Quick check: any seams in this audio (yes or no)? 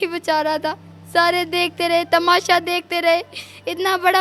no